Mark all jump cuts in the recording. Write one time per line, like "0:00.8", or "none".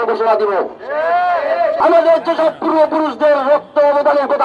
0:01.8